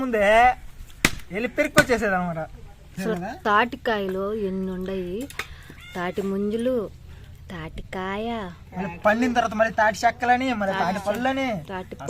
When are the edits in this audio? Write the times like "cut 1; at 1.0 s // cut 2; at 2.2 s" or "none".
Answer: cut 1; at 3.0 s